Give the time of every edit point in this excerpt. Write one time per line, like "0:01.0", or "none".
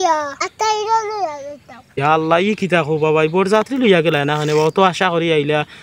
none

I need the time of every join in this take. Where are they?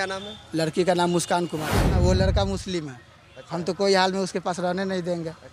0:02.0

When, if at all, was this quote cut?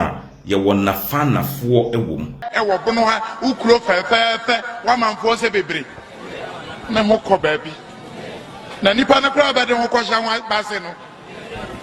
0:02.4

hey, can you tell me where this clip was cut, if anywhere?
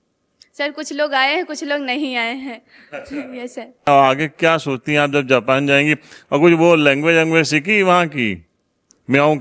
0:03.9

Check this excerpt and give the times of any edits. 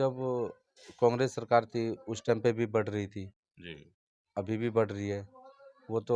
none

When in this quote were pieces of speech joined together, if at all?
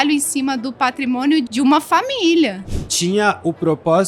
0:01.5
0:02.7

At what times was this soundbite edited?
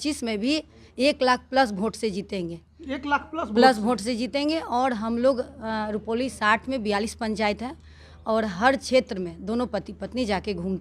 none

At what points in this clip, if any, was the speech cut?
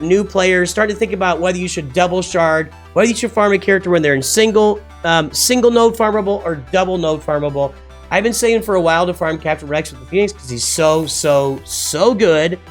none

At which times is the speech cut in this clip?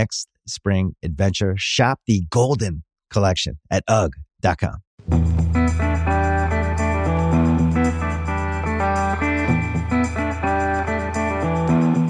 0:04.9

